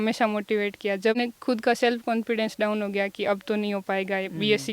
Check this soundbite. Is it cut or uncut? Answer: cut